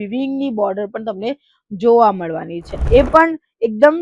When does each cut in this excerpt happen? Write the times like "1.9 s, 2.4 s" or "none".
2.7 s